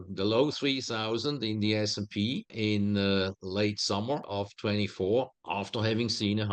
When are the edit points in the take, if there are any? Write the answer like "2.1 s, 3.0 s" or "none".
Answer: 2.5 s, 4.3 s, 5.4 s